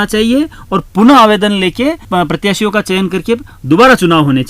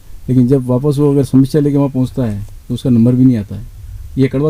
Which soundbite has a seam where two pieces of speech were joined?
first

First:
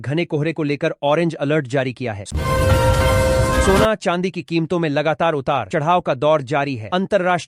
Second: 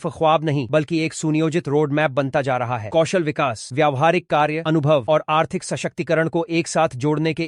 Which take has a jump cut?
first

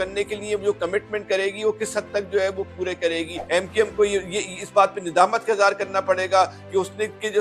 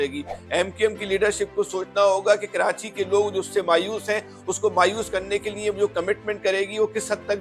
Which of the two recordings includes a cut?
first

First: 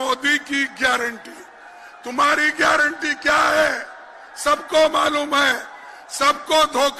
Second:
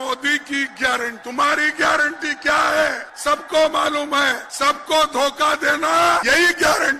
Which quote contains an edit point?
second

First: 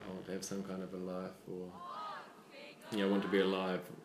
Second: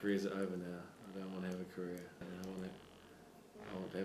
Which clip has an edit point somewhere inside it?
second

